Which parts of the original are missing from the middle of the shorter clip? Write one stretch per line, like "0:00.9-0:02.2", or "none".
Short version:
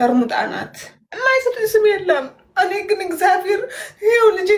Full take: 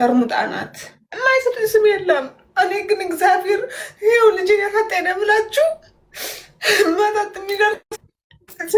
none